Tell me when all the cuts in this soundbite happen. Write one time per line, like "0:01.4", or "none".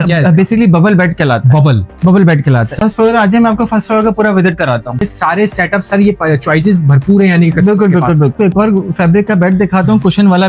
0:02.8
0:05.0
0:08.4